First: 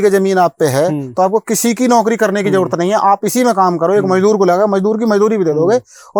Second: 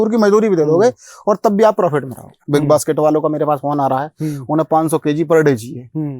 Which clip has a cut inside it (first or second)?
second